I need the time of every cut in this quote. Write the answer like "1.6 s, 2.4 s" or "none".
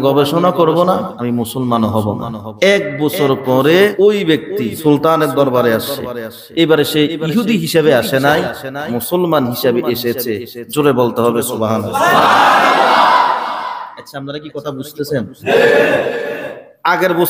1.1 s, 2.4 s, 4.1 s